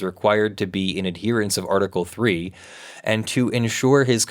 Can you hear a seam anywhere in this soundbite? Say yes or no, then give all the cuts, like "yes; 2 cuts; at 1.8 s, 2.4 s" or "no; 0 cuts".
no; 0 cuts